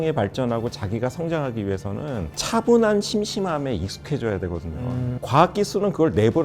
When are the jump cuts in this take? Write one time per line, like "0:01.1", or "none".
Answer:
0:05.2

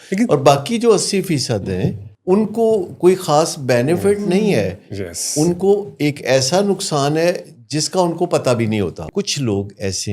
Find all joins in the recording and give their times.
0:02.1
0:09.1

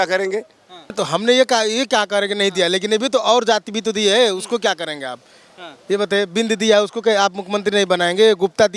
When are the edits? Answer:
0:01.0

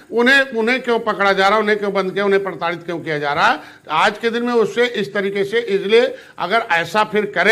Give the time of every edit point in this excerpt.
none

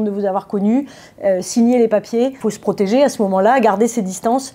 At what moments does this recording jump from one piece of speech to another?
0:02.5

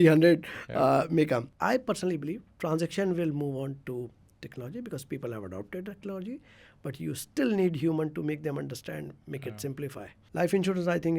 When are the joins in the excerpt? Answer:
0:01.5
0:10.2

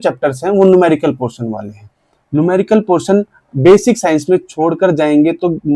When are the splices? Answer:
none

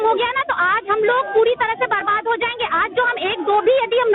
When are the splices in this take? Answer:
none

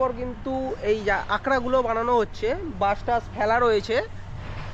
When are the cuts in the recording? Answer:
none

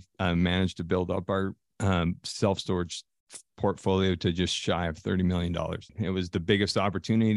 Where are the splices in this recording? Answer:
0:05.9

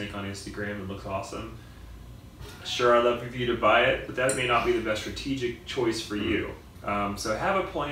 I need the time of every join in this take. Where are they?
none

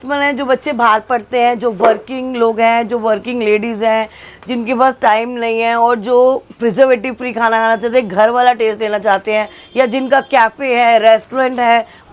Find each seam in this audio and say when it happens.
none

